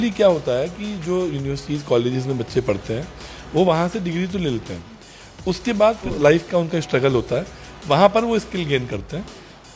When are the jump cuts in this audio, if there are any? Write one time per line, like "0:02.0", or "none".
0:06.1